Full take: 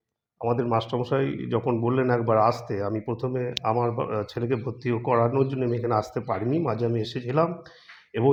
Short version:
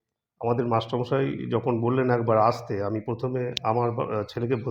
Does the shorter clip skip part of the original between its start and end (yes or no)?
no